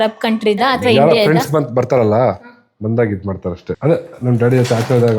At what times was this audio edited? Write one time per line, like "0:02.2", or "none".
0:03.7